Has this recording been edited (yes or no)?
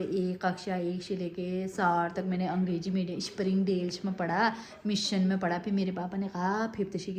no